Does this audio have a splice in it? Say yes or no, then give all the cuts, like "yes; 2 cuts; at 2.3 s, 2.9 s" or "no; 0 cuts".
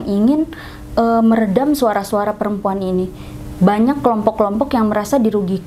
no; 0 cuts